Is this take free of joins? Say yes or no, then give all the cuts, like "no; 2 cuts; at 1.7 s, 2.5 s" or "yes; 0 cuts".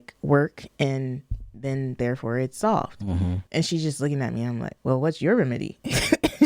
no; 1 cut; at 3.4 s